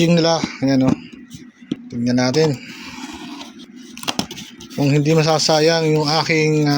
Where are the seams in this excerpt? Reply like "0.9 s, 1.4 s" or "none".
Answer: 1.9 s, 3.7 s